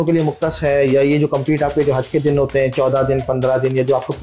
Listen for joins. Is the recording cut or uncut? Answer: uncut